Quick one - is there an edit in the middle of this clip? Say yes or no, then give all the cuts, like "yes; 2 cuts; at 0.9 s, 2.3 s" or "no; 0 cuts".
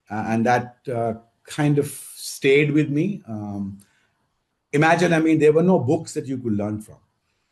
no; 0 cuts